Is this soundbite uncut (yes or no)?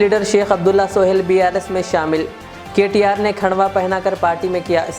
yes